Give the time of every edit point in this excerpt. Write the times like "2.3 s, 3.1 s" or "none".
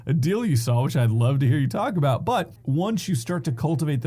2.6 s